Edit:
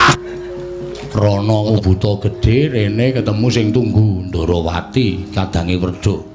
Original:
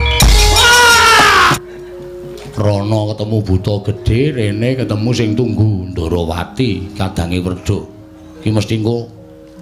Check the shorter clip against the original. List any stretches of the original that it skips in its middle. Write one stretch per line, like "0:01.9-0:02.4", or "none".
0:03.1-0:03.3